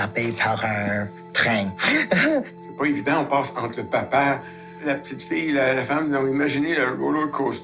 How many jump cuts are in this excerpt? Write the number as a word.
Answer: two